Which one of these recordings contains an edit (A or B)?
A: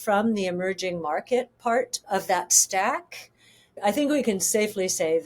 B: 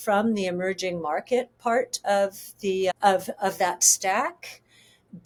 A